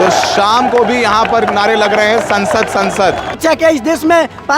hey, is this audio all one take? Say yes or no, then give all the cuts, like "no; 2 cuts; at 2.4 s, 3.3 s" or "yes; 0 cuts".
no; 1 cut; at 3.3 s